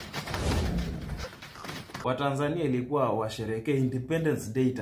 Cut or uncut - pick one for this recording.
cut